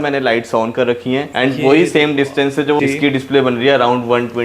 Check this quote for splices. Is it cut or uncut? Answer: cut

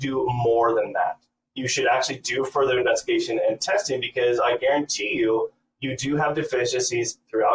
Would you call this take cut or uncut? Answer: uncut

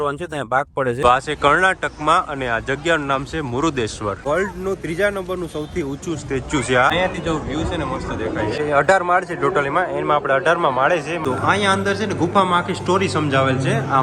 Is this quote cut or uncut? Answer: cut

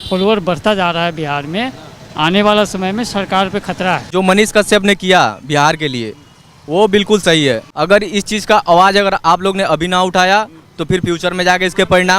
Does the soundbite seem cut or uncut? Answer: cut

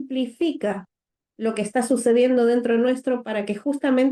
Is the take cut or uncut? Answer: uncut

